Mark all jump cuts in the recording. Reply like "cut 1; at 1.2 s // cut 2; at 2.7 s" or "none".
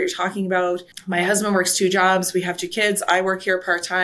cut 1; at 0.9 s